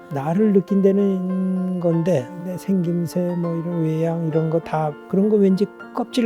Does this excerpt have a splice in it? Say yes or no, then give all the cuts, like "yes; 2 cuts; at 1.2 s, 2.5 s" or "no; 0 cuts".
yes; 2 cuts; at 2.3 s, 5.0 s